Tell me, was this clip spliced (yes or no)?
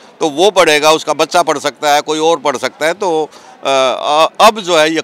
no